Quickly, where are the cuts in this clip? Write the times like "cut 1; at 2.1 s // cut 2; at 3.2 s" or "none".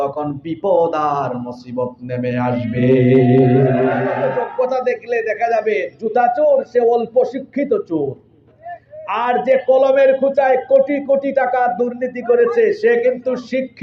cut 1; at 4.1 s